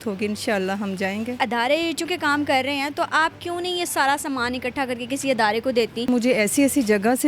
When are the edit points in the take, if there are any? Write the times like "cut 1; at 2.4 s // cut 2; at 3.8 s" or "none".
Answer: cut 1; at 1.4 s // cut 2; at 6.1 s